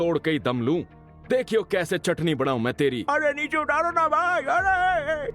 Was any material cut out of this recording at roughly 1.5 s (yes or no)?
no